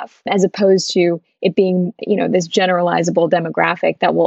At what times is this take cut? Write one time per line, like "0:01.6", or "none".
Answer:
none